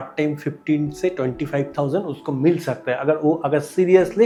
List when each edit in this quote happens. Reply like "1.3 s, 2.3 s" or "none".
none